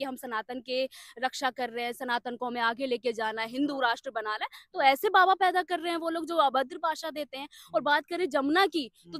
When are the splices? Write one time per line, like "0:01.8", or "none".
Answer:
none